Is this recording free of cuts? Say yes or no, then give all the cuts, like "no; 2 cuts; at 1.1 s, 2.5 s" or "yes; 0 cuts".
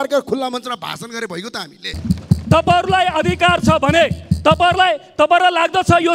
no; 1 cut; at 1.9 s